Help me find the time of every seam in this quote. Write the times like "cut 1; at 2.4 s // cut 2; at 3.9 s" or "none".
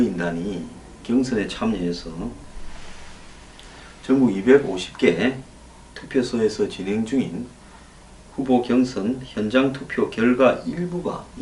cut 1; at 9.6 s